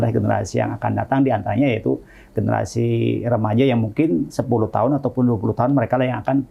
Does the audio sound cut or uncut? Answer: uncut